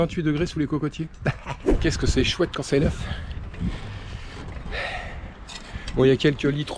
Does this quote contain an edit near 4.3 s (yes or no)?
no